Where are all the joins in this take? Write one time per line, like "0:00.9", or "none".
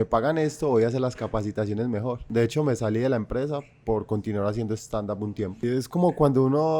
0:02.2
0:05.6